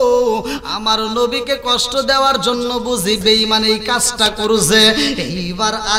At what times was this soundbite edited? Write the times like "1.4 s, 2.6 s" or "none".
none